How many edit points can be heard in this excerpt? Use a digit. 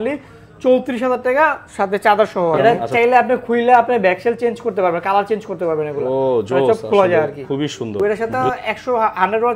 2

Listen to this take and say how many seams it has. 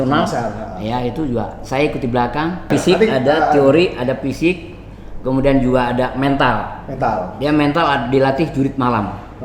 1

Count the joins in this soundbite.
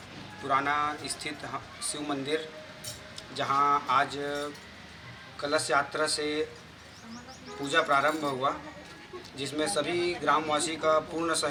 0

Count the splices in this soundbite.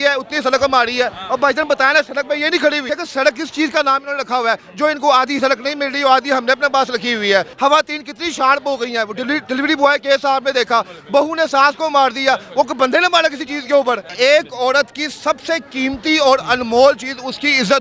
3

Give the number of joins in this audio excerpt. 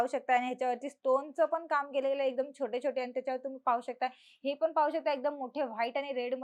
0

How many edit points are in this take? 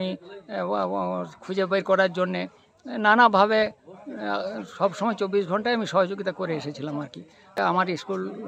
1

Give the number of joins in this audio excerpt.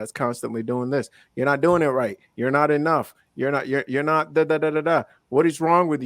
0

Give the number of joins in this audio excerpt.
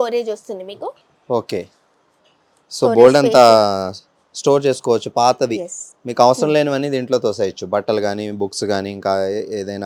0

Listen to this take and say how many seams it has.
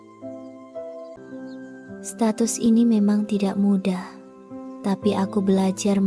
1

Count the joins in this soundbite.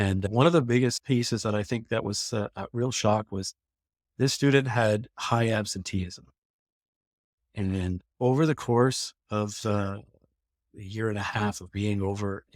0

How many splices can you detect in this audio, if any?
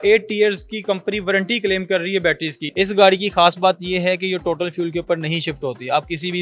1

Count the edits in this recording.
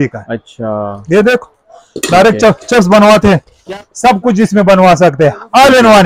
1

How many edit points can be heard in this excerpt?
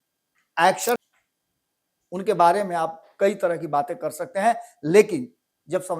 1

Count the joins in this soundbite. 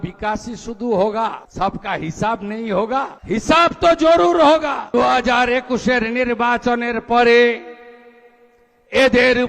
3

